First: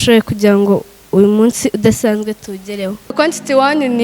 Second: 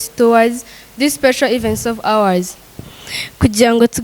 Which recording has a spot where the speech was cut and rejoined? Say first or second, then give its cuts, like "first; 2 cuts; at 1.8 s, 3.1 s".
first; 1 cut; at 3.1 s